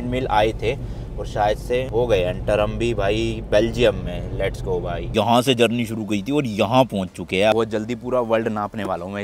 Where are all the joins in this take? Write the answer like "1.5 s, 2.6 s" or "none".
5.1 s